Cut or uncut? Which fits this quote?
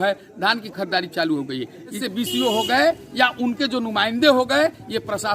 cut